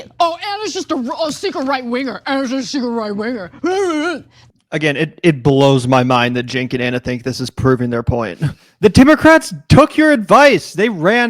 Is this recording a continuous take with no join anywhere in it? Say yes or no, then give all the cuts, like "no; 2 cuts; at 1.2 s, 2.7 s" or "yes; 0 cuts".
no; 1 cut; at 4.3 s